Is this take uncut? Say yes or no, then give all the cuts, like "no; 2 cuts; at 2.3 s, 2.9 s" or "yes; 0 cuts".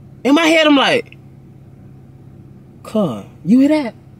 yes; 0 cuts